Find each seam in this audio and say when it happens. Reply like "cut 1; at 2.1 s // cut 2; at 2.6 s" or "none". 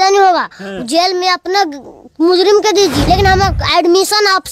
cut 1; at 3.0 s